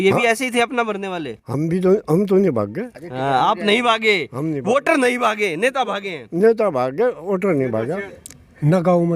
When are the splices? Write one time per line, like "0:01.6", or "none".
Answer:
0:08.1